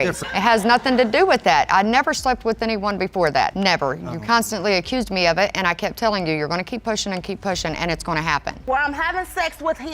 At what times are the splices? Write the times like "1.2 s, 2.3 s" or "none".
8.6 s